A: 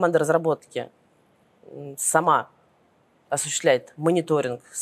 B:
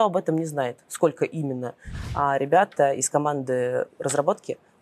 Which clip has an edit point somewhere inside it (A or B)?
B